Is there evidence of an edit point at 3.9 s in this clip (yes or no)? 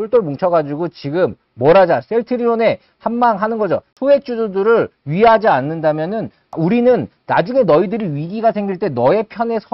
yes